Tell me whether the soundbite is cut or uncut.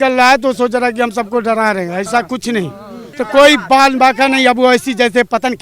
cut